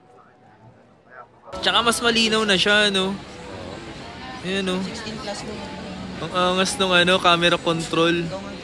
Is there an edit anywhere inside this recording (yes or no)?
yes